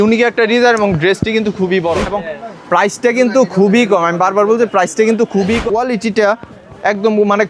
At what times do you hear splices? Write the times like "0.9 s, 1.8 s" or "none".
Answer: 2.1 s, 5.6 s